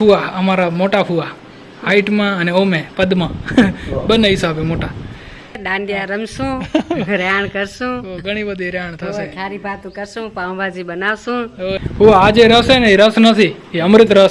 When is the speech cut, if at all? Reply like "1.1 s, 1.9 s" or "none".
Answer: 5.6 s, 11.8 s

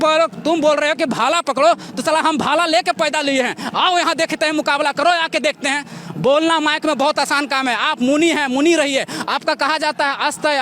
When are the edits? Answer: none

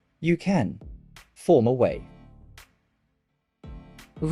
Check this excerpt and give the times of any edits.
none

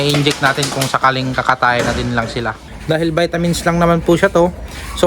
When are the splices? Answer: 2.6 s

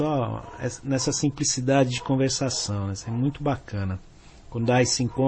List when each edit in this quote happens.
2.6 s

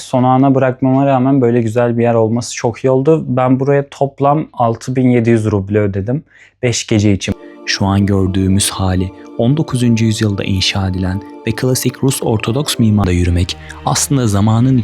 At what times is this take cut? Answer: 7.4 s, 13.0 s

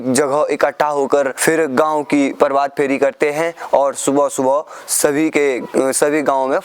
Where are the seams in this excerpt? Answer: 1.4 s

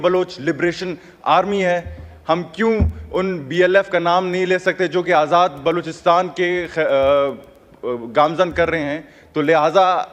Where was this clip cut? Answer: none

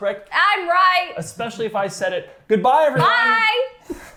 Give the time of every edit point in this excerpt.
none

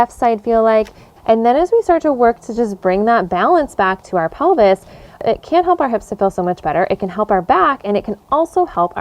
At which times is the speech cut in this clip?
1.1 s, 5.2 s

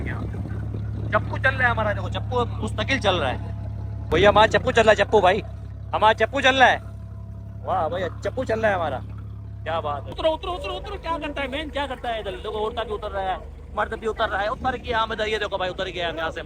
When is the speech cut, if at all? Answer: 4.1 s, 10.2 s

